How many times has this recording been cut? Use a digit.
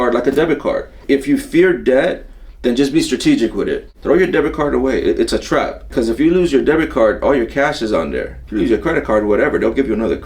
4